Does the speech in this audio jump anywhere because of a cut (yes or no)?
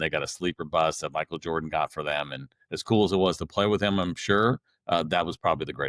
no